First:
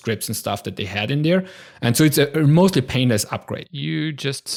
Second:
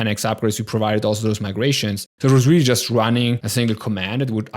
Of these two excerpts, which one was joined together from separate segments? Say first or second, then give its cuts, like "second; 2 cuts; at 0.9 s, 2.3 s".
second; 2 cuts; at 2.1 s, 3.4 s